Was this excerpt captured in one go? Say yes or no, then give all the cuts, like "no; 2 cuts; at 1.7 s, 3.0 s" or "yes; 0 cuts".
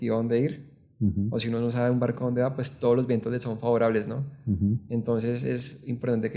yes; 0 cuts